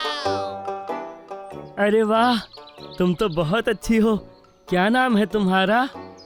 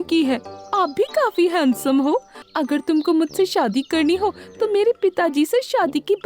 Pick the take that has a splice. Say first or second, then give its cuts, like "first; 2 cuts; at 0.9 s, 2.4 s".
second; 1 cut; at 2.4 s